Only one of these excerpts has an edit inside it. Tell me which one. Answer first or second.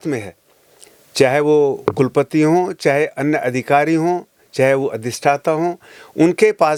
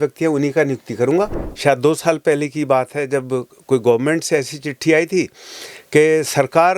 second